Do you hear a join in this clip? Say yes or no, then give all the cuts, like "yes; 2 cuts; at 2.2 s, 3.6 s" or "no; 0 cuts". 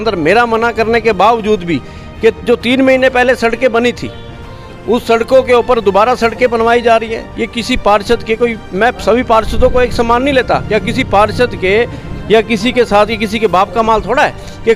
no; 0 cuts